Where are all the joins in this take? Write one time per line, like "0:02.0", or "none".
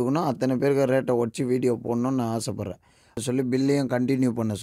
0:03.2